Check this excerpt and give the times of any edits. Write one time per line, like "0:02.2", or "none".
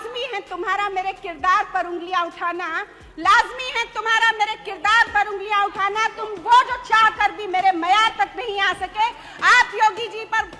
none